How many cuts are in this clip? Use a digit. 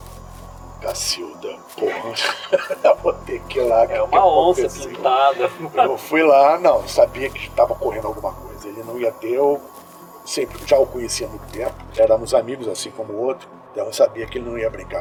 0